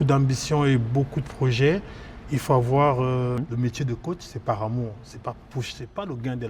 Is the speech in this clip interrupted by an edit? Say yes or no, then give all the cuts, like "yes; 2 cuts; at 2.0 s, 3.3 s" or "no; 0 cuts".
yes; 1 cut; at 3.4 s